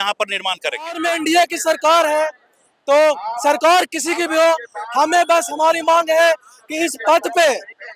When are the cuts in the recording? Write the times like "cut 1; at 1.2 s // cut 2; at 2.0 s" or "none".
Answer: cut 1; at 1.0 s